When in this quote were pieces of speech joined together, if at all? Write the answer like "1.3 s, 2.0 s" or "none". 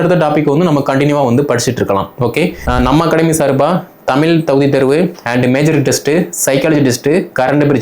2.6 s